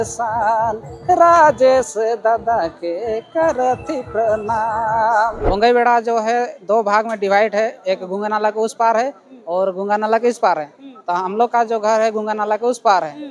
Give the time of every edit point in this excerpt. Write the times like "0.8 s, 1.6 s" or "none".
5.4 s